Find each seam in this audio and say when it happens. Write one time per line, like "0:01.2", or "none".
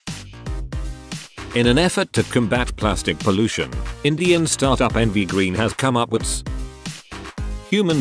none